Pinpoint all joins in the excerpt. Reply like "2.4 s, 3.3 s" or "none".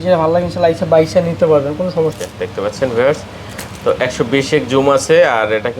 2.1 s